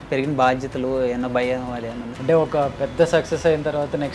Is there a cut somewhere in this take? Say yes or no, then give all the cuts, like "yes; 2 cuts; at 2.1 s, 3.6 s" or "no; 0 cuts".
yes; 1 cut; at 2.1 s